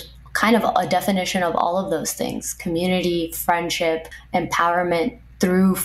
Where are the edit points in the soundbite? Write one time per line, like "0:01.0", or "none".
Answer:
none